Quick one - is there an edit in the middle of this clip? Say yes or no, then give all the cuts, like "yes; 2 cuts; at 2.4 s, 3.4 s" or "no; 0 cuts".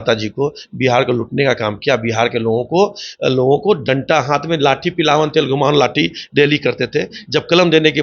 no; 0 cuts